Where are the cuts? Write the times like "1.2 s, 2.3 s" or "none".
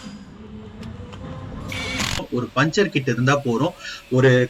2.3 s